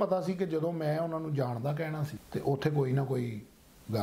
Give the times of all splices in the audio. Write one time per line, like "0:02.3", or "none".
0:02.2